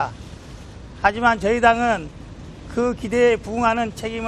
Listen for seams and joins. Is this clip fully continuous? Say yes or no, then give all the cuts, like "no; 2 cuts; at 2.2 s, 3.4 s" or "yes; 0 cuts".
yes; 0 cuts